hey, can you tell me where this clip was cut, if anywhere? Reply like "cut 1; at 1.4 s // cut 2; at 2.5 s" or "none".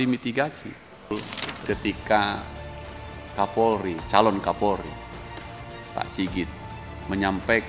cut 1; at 1.1 s